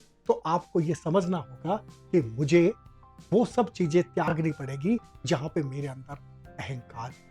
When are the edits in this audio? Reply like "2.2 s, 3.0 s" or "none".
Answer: none